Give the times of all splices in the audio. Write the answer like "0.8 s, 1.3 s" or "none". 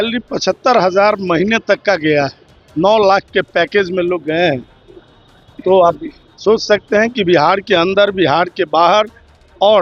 none